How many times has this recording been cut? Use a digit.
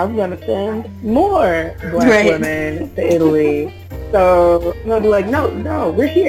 0